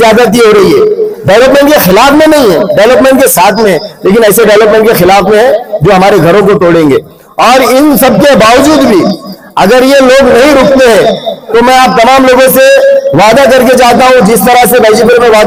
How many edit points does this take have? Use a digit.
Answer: 0